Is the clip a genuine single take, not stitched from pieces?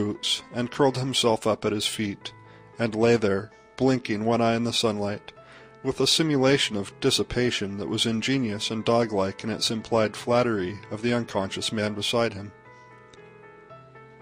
yes; 0 cuts

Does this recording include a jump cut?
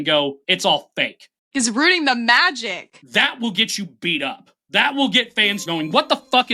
yes; 1 cut; at 5.6 s

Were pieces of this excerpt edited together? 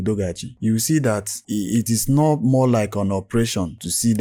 no; 0 cuts

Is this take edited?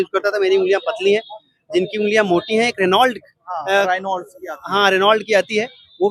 no; 0 cuts

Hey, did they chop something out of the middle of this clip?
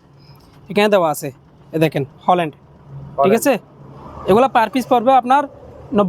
no; 0 cuts

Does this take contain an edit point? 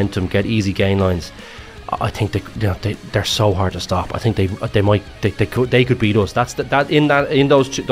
no; 0 cuts

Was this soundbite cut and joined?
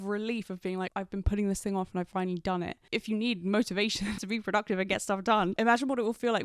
yes; 2 cuts; at 0.9 s, 4.2 s

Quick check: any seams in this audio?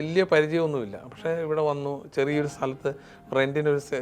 no; 0 cuts

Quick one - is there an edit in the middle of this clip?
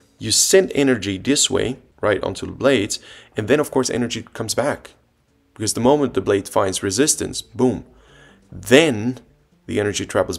yes; 1 cut; at 1.9 s

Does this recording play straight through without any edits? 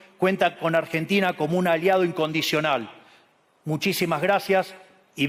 yes; 0 cuts

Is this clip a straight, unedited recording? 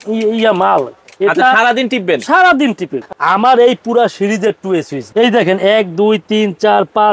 no; 2 cuts; at 3.0 s, 5.0 s

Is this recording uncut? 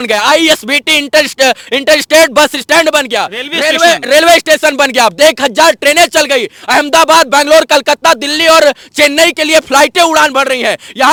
yes; 0 cuts

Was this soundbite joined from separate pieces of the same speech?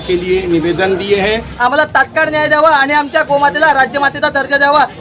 yes; 1 cut; at 1.5 s

